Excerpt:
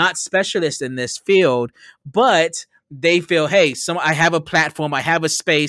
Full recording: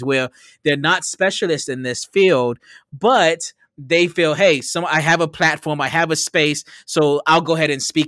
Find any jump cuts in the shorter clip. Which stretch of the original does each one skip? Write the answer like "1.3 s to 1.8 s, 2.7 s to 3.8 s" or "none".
none